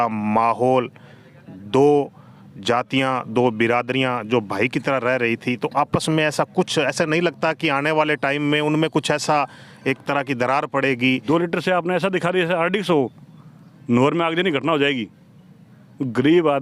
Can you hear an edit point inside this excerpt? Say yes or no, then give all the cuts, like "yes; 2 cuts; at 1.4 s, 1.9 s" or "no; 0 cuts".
yes; 1 cut; at 11.2 s